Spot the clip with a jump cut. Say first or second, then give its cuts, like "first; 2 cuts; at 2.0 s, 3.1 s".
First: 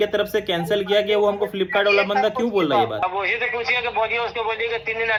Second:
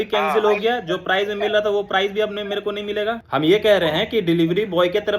second; 1 cut; at 3.2 s